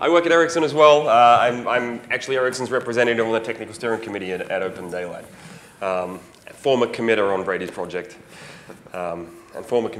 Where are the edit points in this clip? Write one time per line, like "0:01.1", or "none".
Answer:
0:00.9